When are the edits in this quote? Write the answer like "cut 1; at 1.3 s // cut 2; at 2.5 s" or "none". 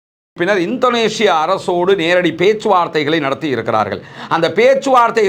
none